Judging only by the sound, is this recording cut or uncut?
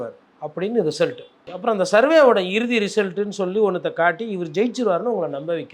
cut